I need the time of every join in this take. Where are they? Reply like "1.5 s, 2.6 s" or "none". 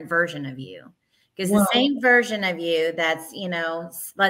none

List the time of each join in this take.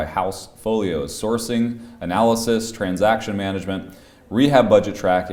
none

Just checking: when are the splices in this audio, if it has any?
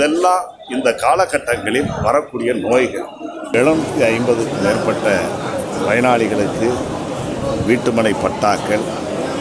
3.5 s

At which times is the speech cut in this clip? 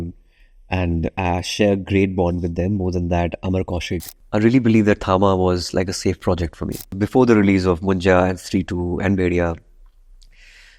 4.1 s, 7.0 s

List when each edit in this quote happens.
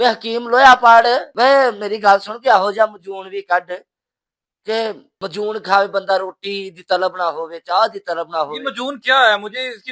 5.1 s

